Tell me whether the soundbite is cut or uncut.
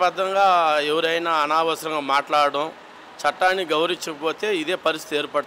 uncut